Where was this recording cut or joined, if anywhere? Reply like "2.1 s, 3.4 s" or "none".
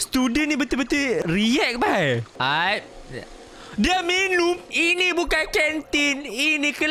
1.2 s, 2.3 s, 4.6 s